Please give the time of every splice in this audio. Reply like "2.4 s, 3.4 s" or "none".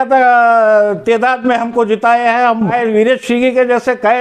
2.7 s